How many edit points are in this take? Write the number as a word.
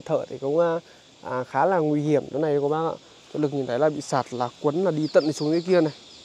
zero